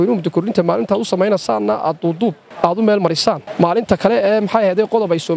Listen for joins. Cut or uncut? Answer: cut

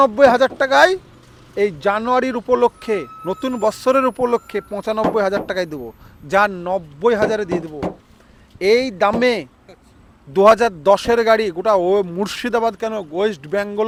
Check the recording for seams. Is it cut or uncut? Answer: uncut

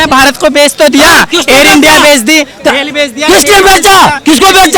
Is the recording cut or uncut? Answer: uncut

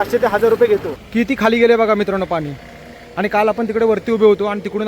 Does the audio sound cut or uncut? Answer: cut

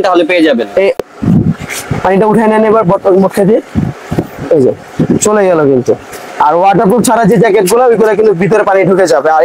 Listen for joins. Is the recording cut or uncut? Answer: cut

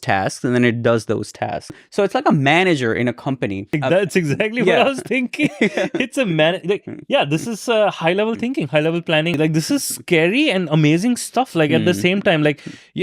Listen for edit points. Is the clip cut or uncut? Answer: cut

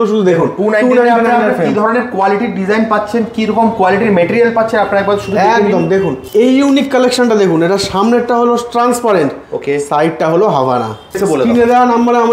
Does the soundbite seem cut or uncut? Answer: cut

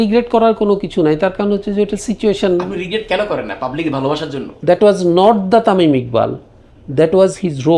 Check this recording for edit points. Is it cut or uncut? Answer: cut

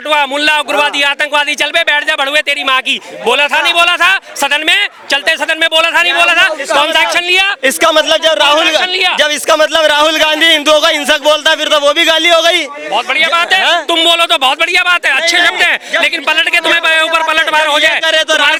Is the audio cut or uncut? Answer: uncut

